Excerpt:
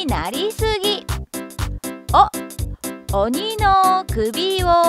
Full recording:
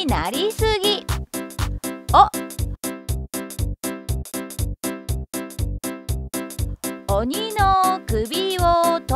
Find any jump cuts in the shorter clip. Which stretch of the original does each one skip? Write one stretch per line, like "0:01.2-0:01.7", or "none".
0:03.0-0:07.0